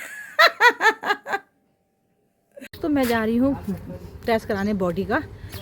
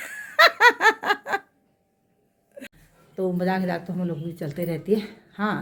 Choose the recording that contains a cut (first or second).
first